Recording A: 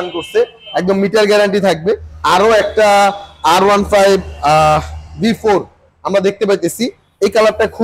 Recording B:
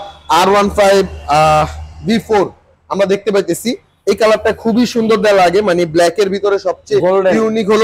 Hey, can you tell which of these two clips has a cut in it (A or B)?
A